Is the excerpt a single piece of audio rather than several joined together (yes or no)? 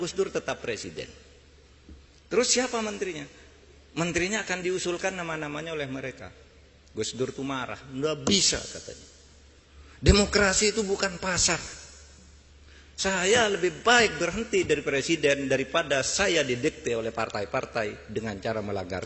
yes